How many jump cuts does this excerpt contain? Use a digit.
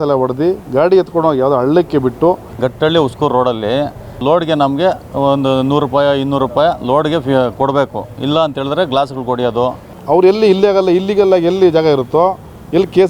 3